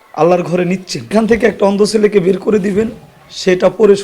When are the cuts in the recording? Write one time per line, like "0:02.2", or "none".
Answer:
0:01.1